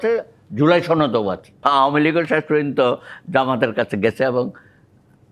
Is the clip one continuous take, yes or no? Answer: no